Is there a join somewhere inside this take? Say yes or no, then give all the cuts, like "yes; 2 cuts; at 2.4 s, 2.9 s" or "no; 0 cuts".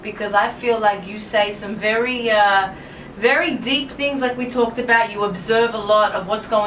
no; 0 cuts